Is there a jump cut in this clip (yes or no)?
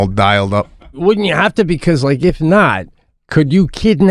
yes